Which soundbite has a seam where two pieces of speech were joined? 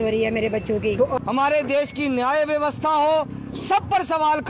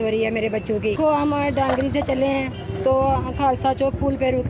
first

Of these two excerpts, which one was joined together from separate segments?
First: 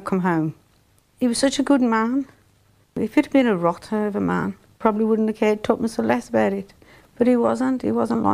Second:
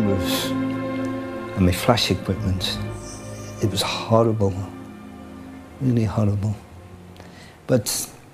first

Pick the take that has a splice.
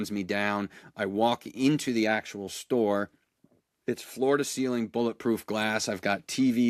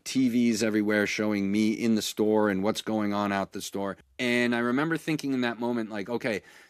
second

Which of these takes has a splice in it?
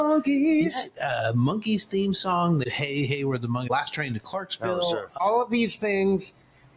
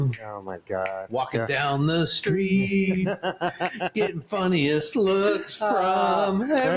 first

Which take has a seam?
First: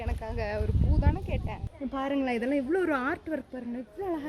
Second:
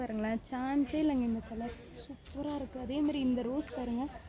first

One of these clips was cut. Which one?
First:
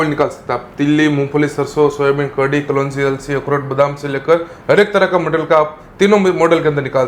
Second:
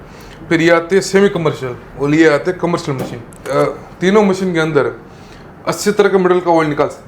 second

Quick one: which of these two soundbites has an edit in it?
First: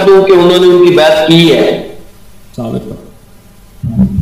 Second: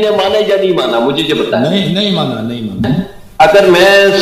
second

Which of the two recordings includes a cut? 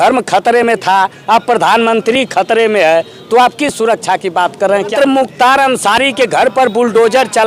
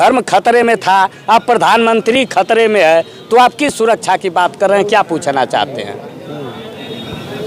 first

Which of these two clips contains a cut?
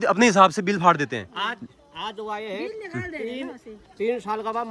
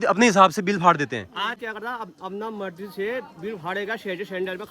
second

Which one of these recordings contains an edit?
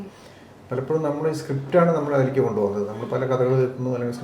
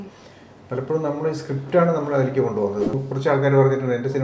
second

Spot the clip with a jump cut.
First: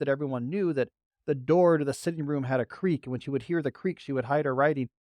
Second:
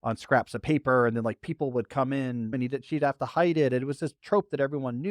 second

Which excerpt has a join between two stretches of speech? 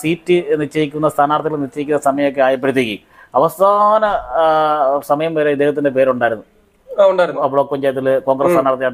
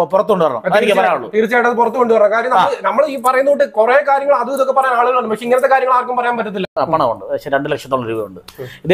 second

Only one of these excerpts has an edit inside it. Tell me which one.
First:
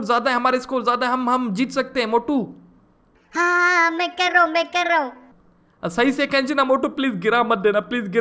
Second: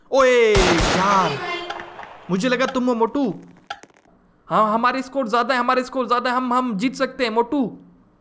second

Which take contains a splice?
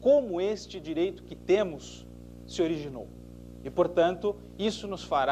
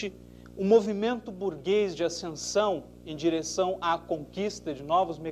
first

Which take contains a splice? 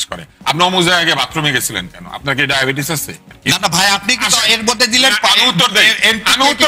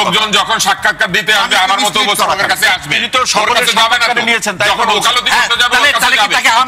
first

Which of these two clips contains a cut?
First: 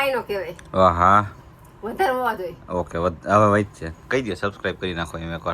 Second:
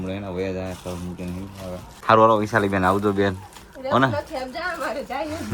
second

